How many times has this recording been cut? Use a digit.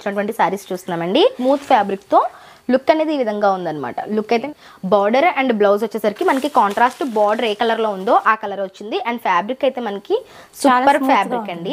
2